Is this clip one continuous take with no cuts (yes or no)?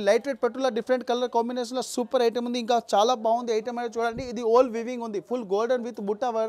yes